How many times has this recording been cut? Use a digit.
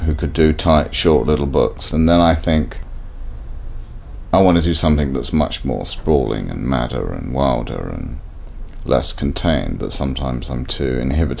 2